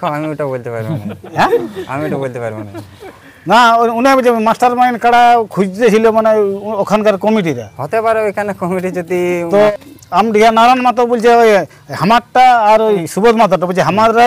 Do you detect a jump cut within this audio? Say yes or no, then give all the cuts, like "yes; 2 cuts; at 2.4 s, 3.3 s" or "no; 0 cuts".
yes; 2 cuts; at 10.0 s, 13.1 s